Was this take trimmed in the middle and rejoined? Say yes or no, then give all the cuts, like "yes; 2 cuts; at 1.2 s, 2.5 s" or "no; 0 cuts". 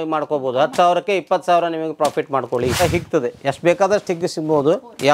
yes; 1 cut; at 2.8 s